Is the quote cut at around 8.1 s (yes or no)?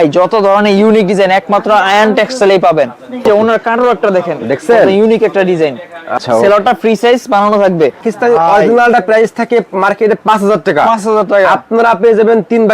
yes